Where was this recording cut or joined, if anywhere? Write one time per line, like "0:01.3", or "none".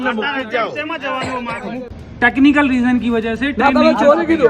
0:01.9